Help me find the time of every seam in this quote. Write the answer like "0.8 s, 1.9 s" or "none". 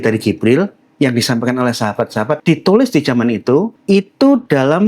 2.4 s, 3.8 s